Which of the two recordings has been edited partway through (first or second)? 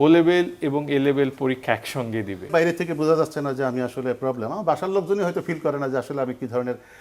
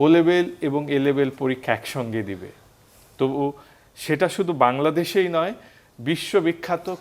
first